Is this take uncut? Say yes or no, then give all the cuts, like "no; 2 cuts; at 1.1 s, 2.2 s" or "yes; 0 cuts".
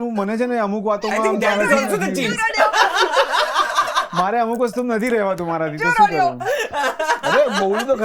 yes; 0 cuts